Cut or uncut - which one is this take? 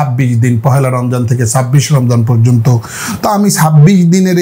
uncut